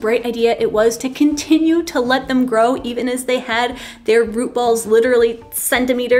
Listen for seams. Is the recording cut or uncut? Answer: cut